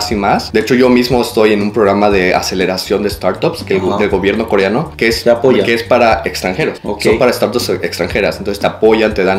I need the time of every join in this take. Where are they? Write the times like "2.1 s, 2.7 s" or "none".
none